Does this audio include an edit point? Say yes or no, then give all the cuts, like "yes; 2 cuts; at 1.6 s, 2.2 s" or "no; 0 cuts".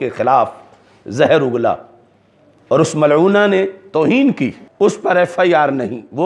yes; 1 cut; at 4.6 s